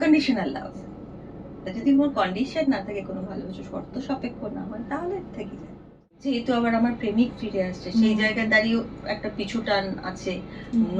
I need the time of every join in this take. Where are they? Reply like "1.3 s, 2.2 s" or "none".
6.2 s